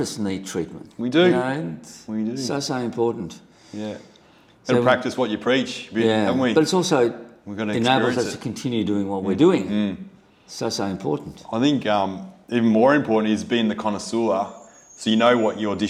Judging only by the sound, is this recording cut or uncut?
uncut